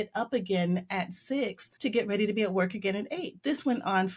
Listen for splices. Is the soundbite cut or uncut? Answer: cut